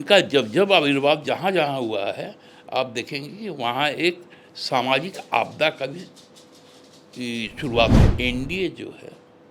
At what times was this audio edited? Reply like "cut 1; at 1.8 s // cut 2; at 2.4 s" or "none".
cut 1; at 8.0 s